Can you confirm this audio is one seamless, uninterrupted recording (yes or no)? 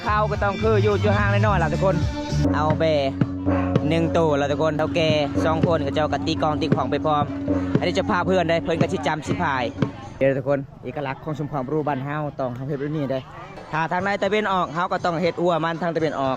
no